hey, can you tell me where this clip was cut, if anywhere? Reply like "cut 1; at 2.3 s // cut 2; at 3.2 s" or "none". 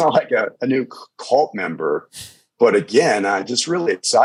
none